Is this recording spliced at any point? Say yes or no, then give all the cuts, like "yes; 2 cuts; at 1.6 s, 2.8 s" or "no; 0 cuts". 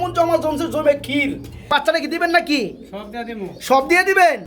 yes; 1 cut; at 1.7 s